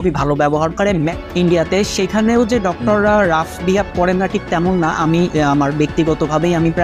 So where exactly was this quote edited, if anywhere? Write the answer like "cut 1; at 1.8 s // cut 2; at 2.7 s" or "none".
cut 1; at 1.2 s

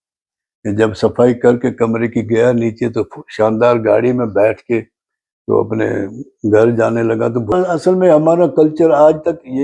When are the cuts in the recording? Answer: cut 1; at 7.5 s

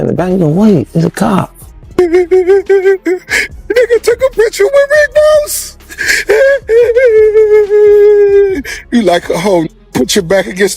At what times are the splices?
cut 1; at 1.9 s

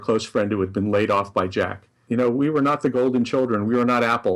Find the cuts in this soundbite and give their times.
cut 1; at 2.0 s

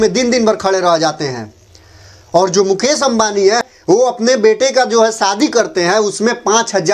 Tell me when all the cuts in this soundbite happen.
cut 1; at 3.6 s

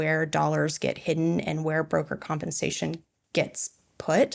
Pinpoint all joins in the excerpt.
cut 1; at 3.1 s

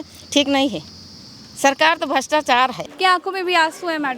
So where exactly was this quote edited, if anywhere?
cut 1; at 2.9 s

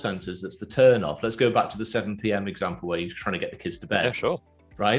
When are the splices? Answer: none

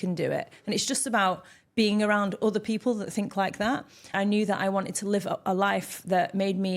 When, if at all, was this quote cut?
cut 1; at 4.1 s

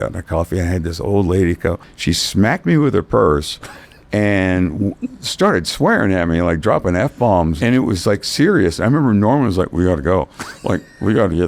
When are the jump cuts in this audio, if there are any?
cut 1; at 1.9 s // cut 2; at 7.6 s

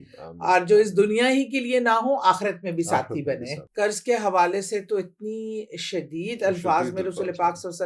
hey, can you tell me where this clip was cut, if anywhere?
cut 1; at 3.6 s

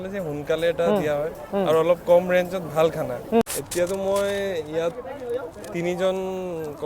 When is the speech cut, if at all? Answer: cut 1; at 3.4 s

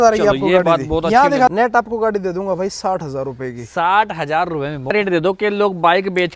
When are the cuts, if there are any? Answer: cut 1; at 1.5 s // cut 2; at 4.9 s

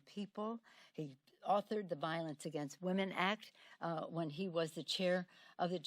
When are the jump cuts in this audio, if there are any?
cut 1; at 3.4 s

